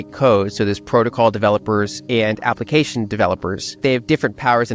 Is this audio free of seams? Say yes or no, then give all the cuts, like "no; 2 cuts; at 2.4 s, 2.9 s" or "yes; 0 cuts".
no; 1 cut; at 3.8 s